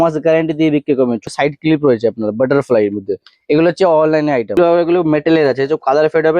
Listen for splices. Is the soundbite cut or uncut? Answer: cut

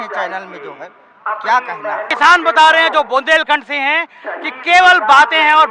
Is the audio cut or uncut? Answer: cut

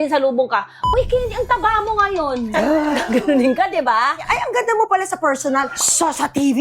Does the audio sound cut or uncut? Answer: cut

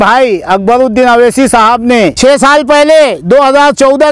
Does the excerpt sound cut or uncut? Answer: cut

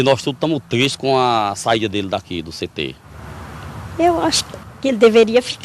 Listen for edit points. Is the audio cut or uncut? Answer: cut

